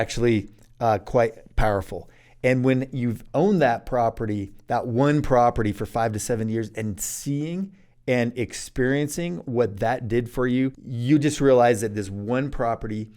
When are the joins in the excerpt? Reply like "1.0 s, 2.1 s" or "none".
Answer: 10.9 s